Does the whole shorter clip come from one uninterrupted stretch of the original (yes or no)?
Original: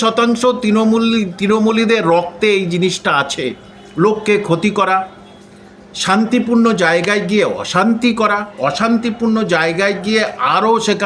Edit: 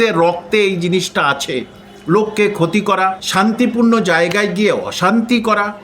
no